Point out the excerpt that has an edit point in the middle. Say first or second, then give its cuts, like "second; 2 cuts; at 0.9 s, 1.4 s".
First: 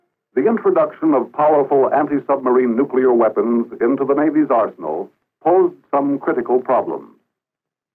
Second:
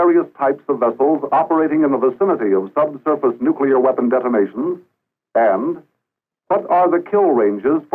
second; 1 cut; at 2.9 s